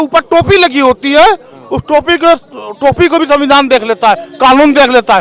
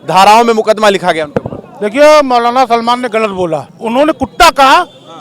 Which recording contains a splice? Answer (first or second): second